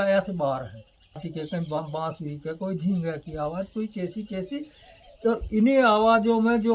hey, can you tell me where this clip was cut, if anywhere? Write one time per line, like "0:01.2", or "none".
0:01.3

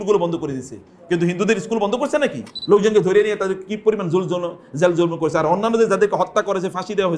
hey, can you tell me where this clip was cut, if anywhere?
0:02.5

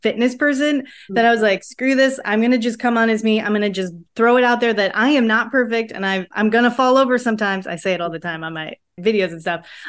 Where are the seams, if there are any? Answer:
none

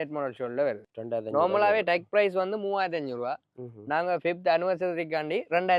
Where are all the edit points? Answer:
0:00.9

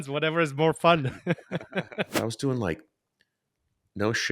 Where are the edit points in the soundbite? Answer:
0:02.1

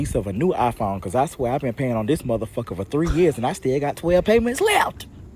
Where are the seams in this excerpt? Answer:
none

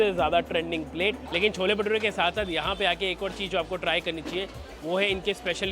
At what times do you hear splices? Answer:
0:01.2

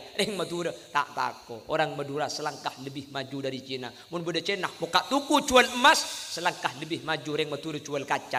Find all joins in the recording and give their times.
none

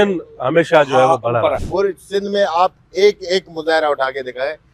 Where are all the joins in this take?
0:01.6

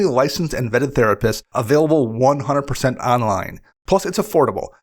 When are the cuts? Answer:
0:01.5

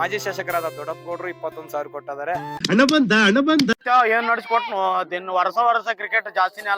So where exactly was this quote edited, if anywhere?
0:02.6

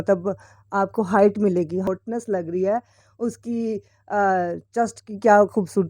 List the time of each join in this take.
0:01.9

